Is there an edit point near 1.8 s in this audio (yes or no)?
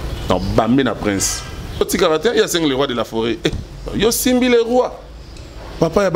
yes